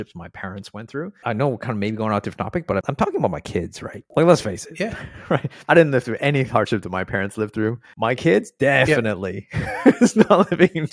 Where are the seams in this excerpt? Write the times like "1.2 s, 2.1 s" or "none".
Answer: 1.1 s, 2.8 s, 5.5 s, 7.9 s